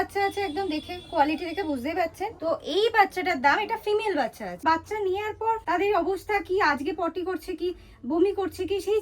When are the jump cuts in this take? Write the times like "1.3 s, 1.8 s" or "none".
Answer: 2.3 s, 4.6 s, 5.6 s